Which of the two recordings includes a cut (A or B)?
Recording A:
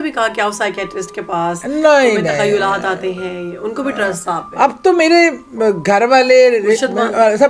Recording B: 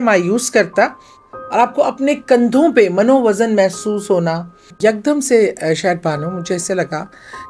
B